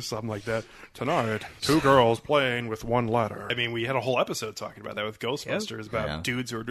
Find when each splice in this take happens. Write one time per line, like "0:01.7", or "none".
0:01.5
0:03.5